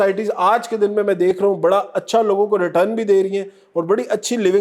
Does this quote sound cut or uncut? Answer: uncut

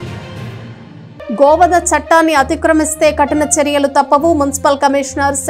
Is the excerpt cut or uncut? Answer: cut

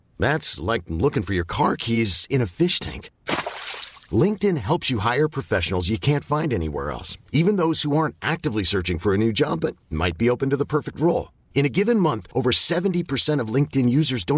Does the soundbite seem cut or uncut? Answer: uncut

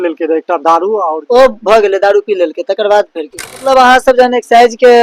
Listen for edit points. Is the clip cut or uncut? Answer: cut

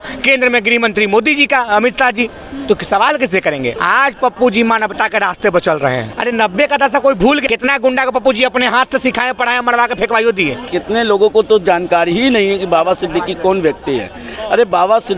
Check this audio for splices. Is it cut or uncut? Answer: cut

